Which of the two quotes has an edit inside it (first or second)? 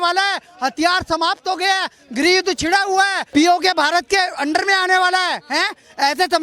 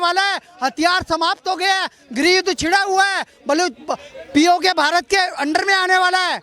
first